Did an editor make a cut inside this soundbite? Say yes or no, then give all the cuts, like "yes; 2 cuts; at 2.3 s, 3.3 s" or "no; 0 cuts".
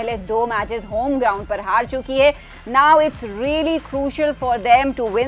no; 0 cuts